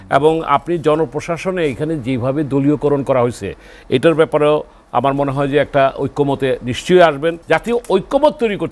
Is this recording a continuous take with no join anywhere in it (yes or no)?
no